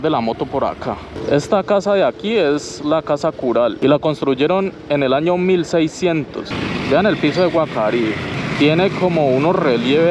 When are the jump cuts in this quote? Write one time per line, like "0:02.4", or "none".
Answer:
0:01.1
0:03.8
0:06.5
0:08.3